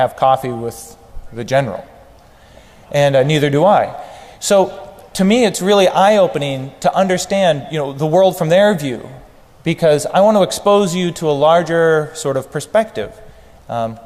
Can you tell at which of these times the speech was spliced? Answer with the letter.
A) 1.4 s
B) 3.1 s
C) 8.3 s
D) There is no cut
C